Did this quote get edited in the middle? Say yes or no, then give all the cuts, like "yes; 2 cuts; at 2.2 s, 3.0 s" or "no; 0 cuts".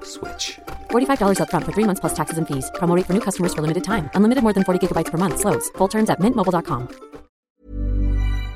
yes; 1 cut; at 7.5 s